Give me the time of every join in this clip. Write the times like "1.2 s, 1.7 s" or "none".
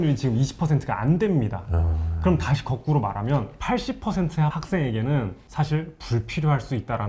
3.5 s, 4.6 s, 5.4 s